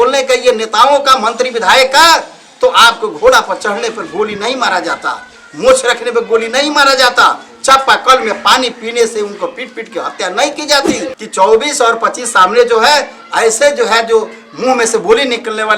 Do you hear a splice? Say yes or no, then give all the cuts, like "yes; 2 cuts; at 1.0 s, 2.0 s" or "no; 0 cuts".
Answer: yes; 1 cut; at 11.2 s